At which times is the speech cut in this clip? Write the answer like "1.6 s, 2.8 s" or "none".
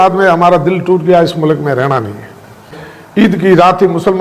2.7 s